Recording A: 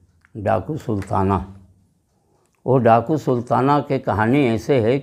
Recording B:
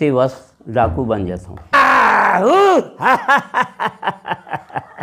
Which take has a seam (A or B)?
B